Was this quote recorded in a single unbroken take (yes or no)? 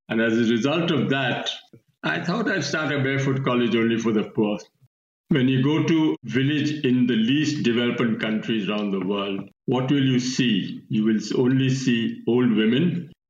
no